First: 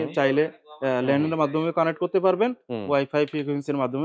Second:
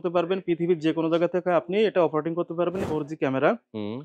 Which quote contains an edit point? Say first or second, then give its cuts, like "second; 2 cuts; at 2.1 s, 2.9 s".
second; 1 cut; at 2.8 s